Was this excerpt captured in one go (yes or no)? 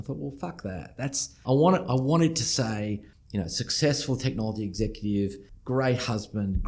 no